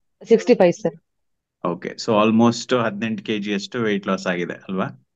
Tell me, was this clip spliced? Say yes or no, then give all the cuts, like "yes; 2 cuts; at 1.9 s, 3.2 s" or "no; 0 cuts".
no; 0 cuts